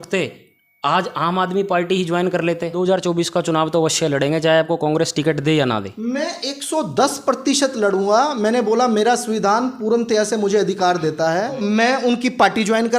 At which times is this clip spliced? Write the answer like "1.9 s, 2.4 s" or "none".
2.7 s, 11.6 s